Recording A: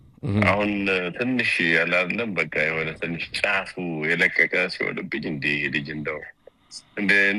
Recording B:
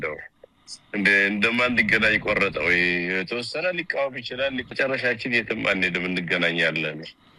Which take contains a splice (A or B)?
B